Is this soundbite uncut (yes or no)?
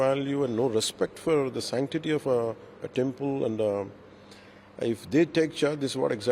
yes